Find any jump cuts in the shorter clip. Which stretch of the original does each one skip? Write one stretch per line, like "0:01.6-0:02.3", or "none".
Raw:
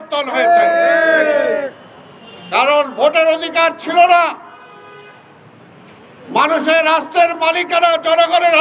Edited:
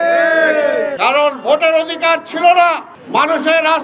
0:01.7-0:02.5
0:04.5-0:06.1